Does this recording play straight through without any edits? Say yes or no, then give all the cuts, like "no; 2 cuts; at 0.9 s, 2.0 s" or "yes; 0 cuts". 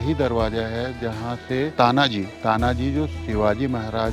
no; 1 cut; at 1.7 s